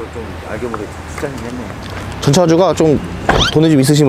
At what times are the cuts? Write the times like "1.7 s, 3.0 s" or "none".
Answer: none